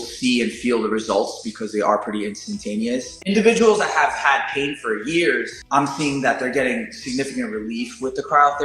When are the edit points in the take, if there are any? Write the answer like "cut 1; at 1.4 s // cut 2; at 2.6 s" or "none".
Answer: cut 1; at 3.1 s // cut 2; at 5.5 s

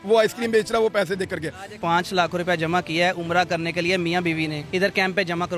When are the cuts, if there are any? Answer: cut 1; at 1.8 s // cut 2; at 4.6 s

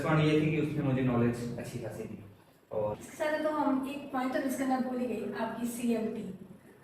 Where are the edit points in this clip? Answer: cut 1; at 2.9 s

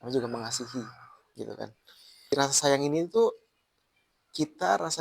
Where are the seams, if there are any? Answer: cut 1; at 2.3 s

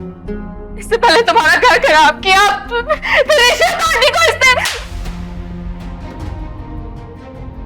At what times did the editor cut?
cut 1; at 6.1 s

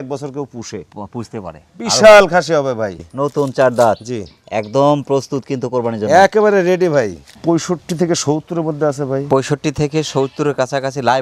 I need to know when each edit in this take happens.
cut 1; at 3.0 s // cut 2; at 7.2 s

